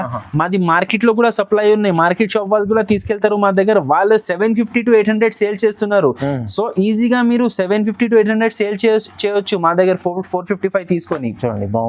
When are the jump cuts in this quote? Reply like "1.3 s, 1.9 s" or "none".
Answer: none